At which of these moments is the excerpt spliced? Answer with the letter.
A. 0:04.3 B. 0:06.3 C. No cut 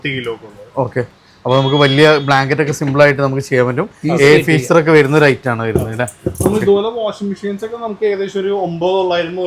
C